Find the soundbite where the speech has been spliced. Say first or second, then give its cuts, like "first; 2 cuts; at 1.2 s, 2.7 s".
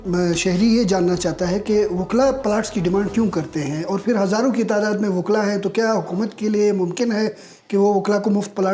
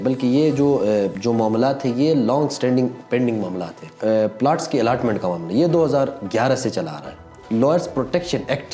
second; 3 cuts; at 1.2 s, 4.0 s, 7.4 s